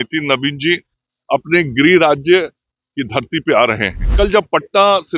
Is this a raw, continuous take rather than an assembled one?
no; 1 cut; at 4.0 s

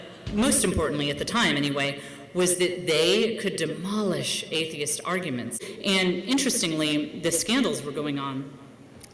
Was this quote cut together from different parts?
yes; 1 cut; at 5.6 s

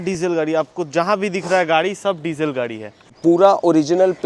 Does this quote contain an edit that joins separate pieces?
yes; 1 cut; at 3.0 s

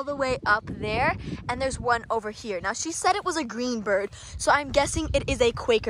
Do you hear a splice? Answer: no; 0 cuts

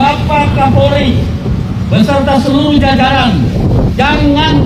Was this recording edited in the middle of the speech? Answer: no; 0 cuts

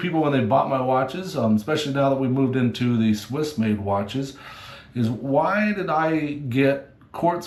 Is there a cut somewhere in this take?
no; 0 cuts

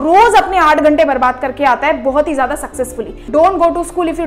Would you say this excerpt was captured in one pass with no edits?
no; 1 cut; at 3.3 s

